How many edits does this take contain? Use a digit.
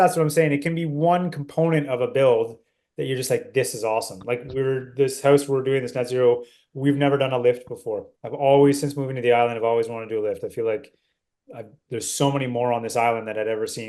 0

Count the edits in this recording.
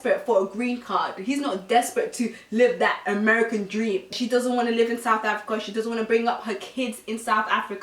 1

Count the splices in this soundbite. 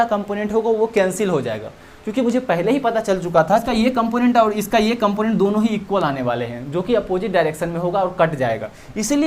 1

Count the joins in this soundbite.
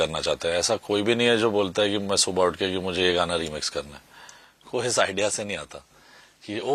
0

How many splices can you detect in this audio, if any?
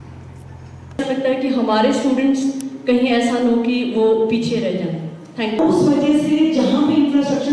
2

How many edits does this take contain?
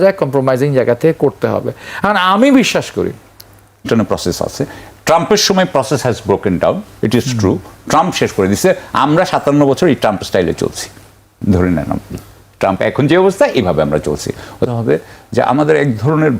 2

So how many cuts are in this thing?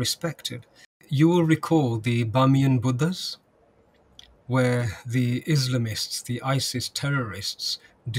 1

